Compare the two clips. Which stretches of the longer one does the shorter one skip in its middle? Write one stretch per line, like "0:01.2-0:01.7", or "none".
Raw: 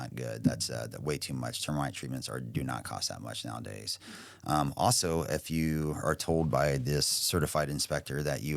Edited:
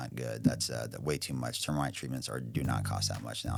none

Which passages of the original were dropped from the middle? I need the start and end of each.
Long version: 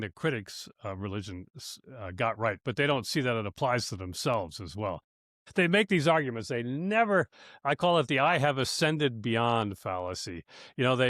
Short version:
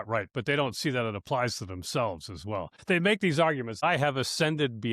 0:05.0-0:05.4
0:06.5-0:08.2

